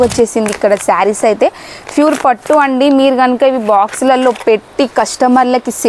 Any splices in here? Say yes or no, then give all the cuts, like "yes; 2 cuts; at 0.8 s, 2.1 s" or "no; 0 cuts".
no; 0 cuts